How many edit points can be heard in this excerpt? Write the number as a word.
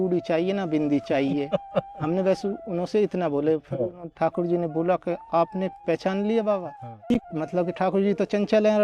one